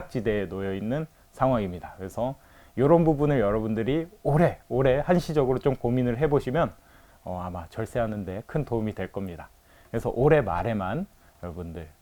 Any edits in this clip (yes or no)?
no